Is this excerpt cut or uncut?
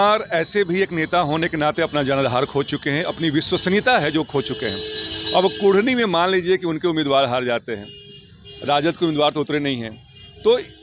uncut